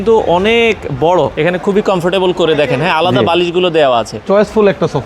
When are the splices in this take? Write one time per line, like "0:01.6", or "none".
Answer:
0:01.3
0:04.1